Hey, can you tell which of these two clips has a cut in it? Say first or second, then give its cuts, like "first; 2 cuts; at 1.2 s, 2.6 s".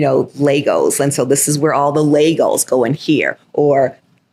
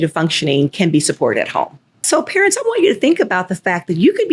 second; 1 cut; at 2.0 s